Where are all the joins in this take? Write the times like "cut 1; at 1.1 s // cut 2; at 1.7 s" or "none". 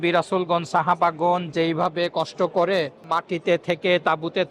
cut 1; at 3.0 s